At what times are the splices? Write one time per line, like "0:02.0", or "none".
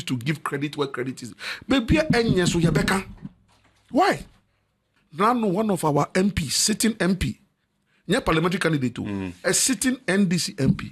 0:05.0